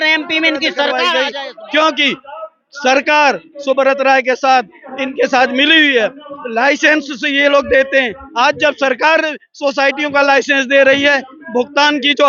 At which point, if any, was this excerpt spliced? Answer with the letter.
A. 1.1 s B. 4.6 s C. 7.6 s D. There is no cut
A